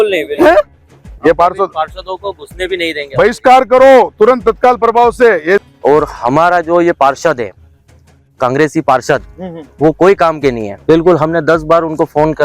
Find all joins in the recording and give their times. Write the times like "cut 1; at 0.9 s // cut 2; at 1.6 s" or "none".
cut 1; at 1.1 s // cut 2; at 5.6 s // cut 3; at 10.7 s